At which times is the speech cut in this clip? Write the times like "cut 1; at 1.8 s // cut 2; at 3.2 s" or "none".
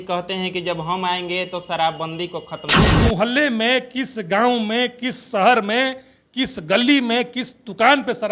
cut 1; at 2.9 s